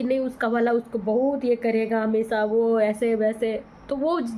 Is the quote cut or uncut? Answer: uncut